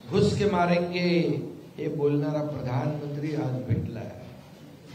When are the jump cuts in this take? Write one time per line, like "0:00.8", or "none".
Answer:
0:02.7